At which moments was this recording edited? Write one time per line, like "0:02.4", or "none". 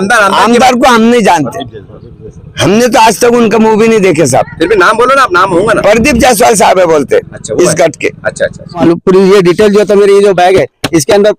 0:08.8